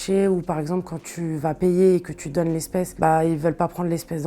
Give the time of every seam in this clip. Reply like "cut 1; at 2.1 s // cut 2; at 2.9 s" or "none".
cut 1; at 2.9 s